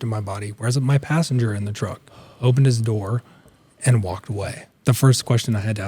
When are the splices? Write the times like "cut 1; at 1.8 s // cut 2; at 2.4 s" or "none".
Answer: cut 1; at 4.7 s